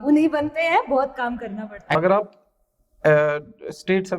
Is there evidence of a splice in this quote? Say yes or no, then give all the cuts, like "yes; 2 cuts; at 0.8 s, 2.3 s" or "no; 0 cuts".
yes; 1 cut; at 2.0 s